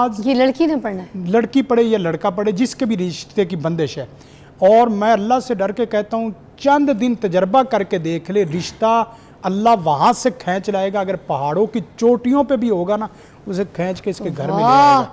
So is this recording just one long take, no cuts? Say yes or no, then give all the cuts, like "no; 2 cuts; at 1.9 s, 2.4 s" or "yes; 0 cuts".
yes; 0 cuts